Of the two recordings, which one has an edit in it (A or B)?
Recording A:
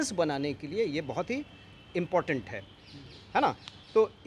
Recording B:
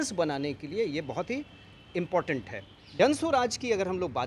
B